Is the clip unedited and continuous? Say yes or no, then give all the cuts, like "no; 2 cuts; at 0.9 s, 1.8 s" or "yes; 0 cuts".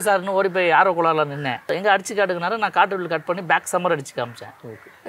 no; 1 cut; at 1.6 s